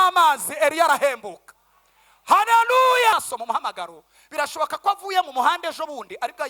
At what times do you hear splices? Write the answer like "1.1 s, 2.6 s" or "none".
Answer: 3.1 s

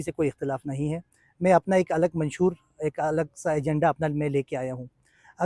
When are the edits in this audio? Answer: none

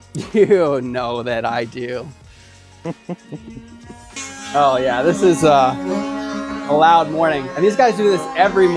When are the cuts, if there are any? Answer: 4.2 s

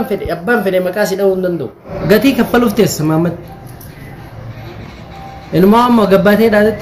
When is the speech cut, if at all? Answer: 1.9 s

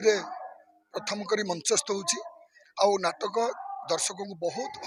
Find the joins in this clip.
none

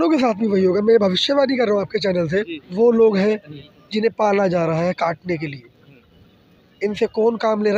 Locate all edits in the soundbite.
2.6 s

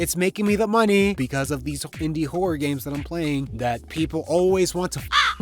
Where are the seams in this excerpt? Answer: 1.2 s, 3.5 s

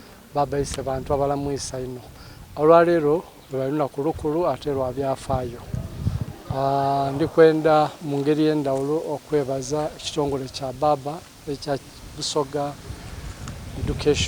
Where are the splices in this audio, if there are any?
none

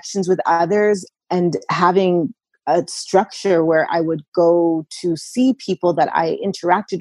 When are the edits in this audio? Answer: 1.1 s

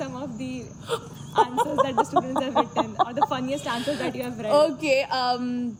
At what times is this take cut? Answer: none

